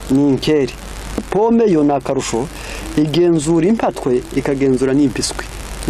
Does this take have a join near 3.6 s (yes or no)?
no